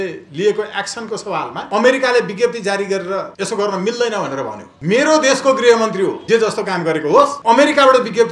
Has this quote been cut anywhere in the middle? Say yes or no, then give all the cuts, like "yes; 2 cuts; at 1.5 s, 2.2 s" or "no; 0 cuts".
yes; 5 cuts; at 1.6 s, 3.3 s, 4.6 s, 6.2 s, 7.4 s